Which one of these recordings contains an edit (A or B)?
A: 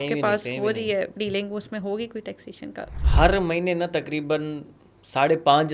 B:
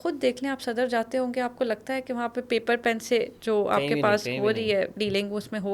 A